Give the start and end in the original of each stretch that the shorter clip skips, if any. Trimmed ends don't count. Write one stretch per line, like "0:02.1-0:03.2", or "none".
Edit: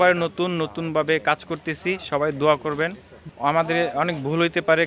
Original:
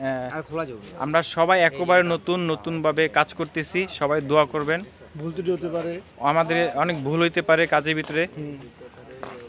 0:05.1-0:06.0